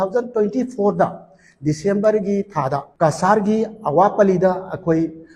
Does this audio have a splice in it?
yes; 1 cut; at 2.9 s

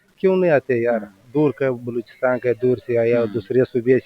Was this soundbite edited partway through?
no; 0 cuts

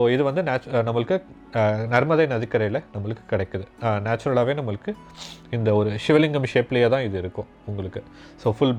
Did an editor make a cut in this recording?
no; 0 cuts

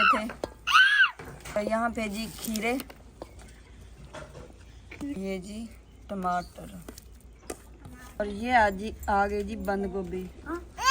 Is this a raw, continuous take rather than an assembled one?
no; 3 cuts; at 1.6 s, 5.2 s, 8.2 s

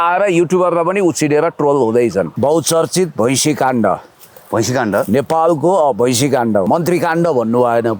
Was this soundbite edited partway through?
yes; 2 cuts; at 2.3 s, 6.7 s

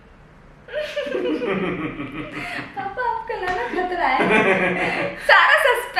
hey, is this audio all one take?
yes; 0 cuts

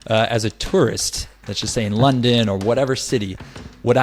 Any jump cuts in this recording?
no; 0 cuts

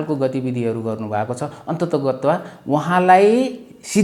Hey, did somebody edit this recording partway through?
no; 0 cuts

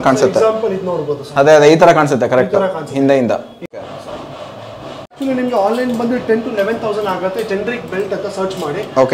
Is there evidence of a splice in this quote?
yes; 2 cuts; at 3.7 s, 5.2 s

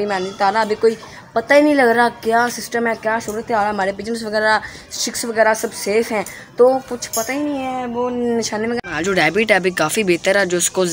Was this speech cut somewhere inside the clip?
yes; 1 cut; at 8.8 s

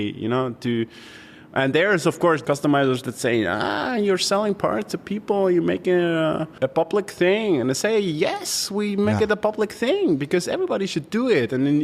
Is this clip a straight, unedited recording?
no; 2 cuts; at 2.4 s, 6.5 s

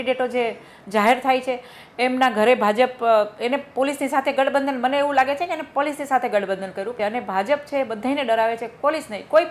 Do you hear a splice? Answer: yes; 1 cut; at 6.9 s

